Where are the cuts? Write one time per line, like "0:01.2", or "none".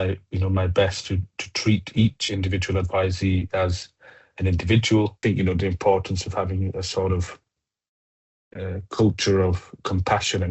0:05.2